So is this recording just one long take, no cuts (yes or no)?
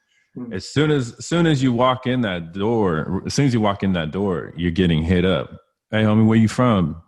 yes